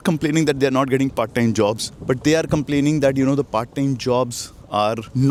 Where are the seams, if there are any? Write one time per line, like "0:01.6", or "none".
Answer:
none